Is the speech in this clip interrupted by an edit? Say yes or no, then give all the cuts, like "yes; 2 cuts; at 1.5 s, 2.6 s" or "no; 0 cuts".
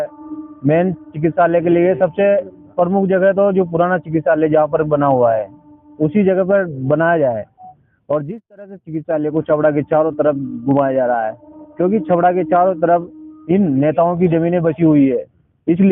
no; 0 cuts